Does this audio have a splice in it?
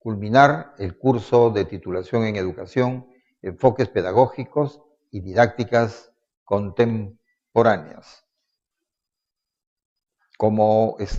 no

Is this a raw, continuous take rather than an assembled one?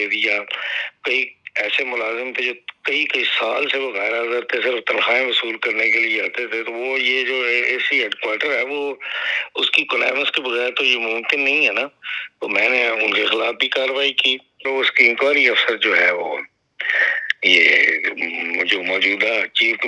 no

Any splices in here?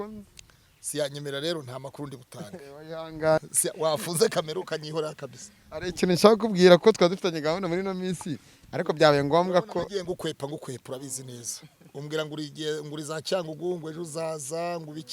yes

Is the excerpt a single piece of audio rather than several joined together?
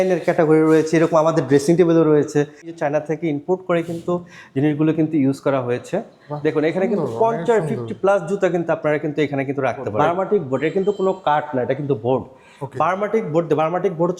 no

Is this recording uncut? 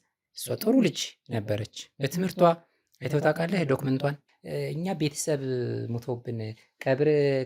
no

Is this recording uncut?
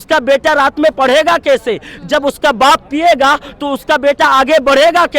yes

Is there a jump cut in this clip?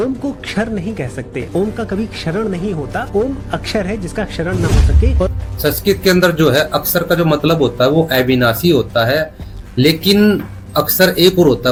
no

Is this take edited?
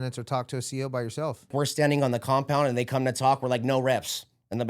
yes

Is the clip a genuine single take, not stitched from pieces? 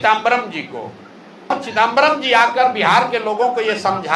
no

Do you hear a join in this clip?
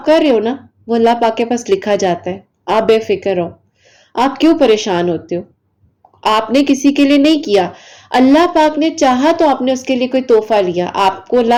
no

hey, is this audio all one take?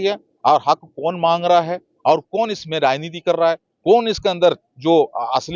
yes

